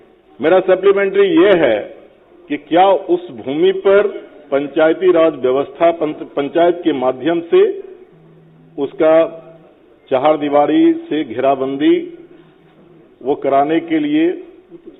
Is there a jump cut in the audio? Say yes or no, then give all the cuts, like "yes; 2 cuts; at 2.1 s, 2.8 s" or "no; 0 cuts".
no; 0 cuts